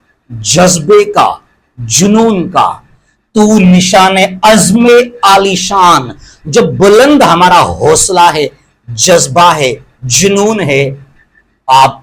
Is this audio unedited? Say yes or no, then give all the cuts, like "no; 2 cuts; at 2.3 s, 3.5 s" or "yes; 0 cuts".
yes; 0 cuts